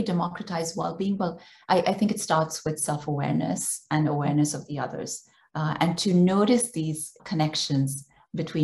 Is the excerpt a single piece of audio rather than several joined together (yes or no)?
no